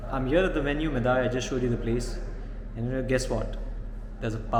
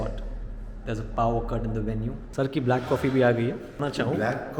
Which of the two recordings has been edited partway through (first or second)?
second